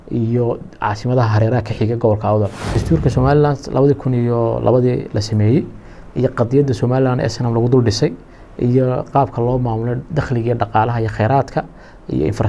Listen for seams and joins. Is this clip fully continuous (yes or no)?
no